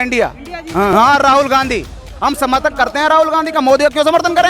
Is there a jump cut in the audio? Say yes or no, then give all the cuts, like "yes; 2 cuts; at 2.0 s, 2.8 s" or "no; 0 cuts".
yes; 1 cut; at 0.9 s